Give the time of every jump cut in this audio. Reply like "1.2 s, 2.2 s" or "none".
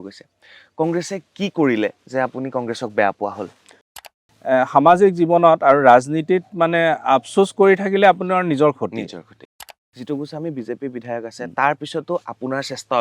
4.1 s, 9.9 s